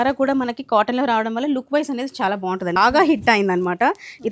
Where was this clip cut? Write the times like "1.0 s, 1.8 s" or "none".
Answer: 2.8 s